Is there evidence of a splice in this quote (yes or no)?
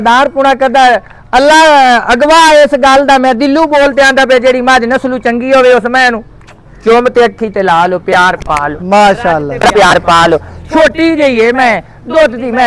no